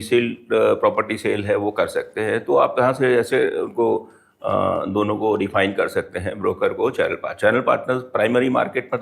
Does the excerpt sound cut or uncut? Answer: uncut